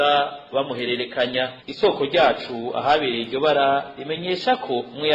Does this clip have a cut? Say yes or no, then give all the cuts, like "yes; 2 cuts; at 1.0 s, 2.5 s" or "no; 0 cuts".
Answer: no; 0 cuts